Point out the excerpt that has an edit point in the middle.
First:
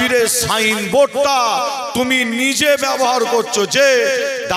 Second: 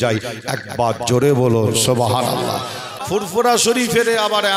second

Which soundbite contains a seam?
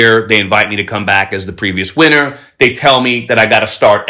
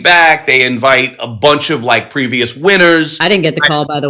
second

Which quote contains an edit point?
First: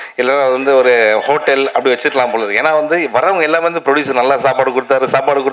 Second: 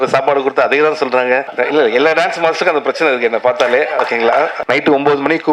second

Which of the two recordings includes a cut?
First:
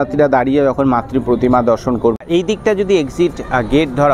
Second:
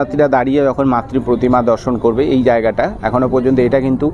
first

